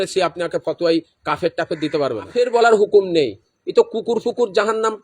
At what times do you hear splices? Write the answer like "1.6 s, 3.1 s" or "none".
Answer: 2.3 s